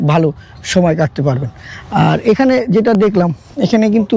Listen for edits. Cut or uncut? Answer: uncut